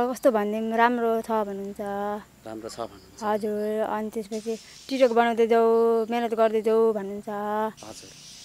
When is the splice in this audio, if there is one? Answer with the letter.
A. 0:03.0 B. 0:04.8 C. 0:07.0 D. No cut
D